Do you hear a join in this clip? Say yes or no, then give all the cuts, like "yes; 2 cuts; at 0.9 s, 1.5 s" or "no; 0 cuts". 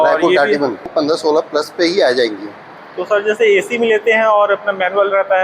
yes; 1 cut; at 0.9 s